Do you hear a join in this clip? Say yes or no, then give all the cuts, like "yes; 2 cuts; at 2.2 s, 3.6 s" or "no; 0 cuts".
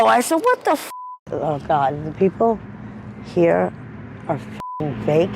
yes; 1 cut; at 1.1 s